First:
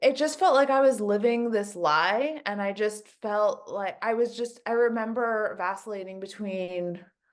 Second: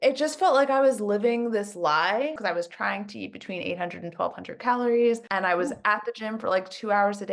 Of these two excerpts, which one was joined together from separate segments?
second; 2 cuts; at 2.4 s, 5.3 s

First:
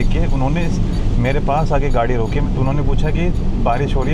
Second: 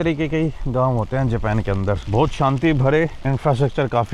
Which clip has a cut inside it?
first; 1 cut; at 2.5 s

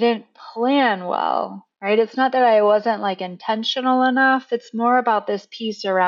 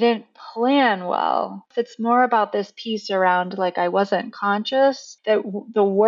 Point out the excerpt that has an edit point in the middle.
second; 2 cuts; at 1.7 s, 5.1 s

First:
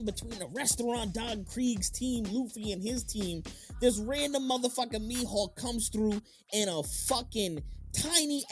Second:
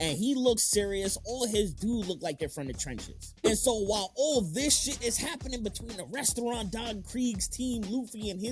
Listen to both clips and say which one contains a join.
second; 1 cut; at 3.3 s

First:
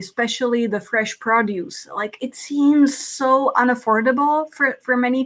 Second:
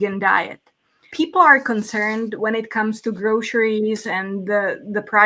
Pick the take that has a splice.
second; 1 cut; at 1.0 s

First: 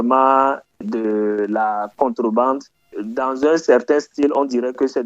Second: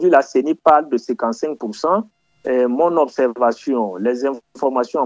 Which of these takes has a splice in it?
first; 2 cuts; at 0.8 s, 3.0 s

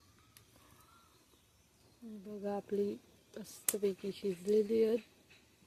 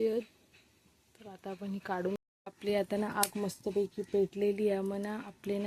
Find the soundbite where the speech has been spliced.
second; 1 cut; at 2.2 s

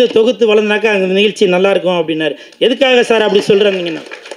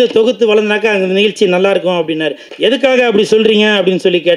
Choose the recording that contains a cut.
second; 1 cut; at 2.4 s

